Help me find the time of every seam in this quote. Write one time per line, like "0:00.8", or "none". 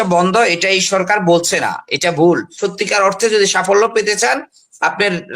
0:02.5